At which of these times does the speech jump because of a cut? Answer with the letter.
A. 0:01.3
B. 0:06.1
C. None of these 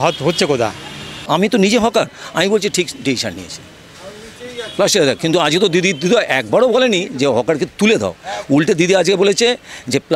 A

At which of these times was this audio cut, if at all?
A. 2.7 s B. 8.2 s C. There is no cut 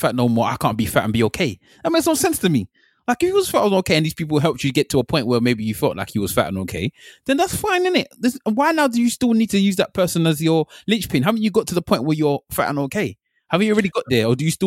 C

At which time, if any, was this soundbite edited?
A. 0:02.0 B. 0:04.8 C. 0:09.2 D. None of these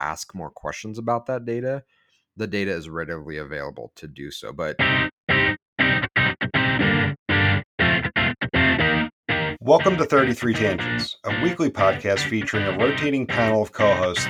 B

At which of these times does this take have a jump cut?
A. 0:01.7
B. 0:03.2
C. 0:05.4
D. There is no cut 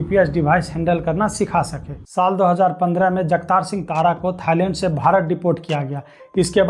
D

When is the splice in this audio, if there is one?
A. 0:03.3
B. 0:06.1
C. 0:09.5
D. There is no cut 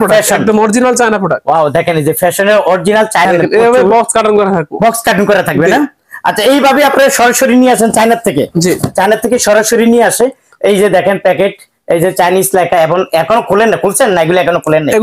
A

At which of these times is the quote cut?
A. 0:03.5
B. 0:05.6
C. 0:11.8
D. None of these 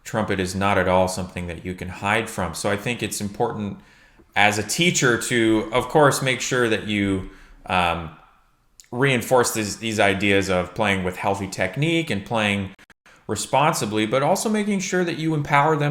D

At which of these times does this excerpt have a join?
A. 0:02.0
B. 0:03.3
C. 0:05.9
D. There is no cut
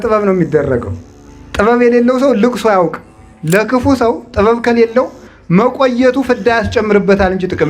B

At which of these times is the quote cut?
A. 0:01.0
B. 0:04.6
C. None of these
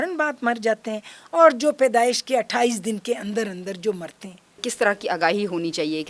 B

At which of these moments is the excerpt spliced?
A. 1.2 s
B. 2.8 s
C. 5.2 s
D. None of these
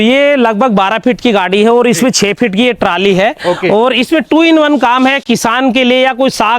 D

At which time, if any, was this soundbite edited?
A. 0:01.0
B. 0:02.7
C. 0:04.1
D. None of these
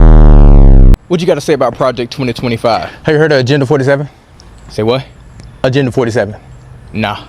A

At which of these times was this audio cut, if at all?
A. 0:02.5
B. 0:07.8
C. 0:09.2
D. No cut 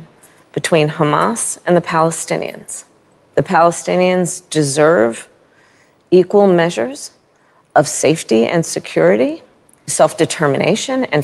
D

